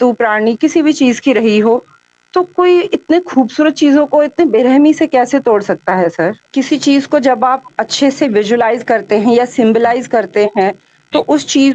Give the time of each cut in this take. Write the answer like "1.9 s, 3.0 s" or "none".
6.4 s

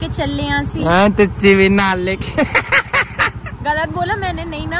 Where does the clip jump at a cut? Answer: none

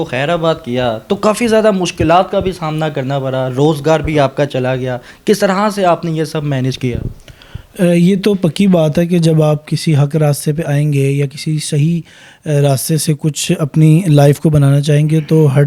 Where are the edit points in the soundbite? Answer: none

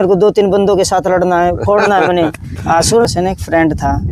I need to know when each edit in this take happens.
3.1 s

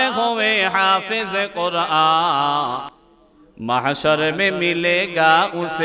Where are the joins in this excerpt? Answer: 3.0 s

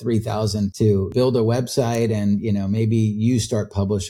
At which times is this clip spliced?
1.0 s

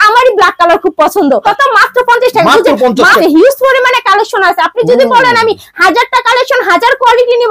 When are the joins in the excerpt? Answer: 1.4 s, 3.2 s

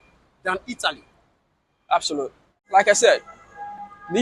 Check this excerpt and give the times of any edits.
2.6 s

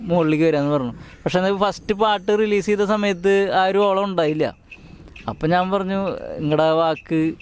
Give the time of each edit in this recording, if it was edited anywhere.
none

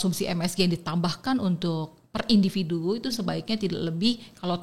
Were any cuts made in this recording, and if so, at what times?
none

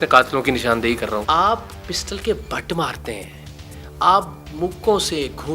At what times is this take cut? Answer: 1.2 s

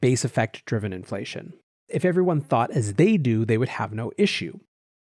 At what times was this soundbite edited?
1.8 s

